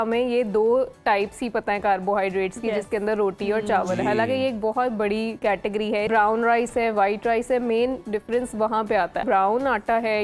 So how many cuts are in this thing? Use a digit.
2